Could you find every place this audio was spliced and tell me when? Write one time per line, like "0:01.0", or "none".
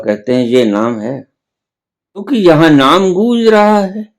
0:02.2